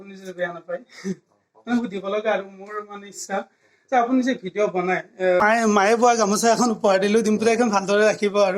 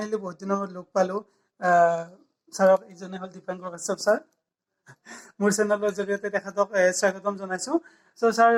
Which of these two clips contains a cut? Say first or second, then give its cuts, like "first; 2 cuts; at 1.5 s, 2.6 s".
first; 1 cut; at 5.4 s